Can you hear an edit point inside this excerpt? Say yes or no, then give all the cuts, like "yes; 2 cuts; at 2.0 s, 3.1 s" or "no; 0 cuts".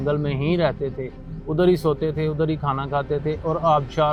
no; 0 cuts